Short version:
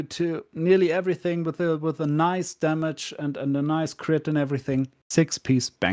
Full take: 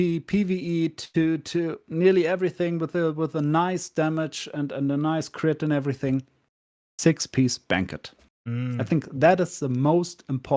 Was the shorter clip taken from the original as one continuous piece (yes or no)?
no